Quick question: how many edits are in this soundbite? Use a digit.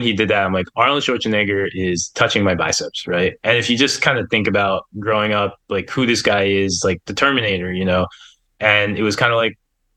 0